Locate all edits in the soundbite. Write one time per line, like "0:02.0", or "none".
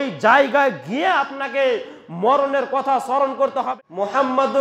0:03.6